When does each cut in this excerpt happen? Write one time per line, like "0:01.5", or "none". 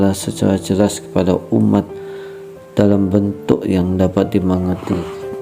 0:03.4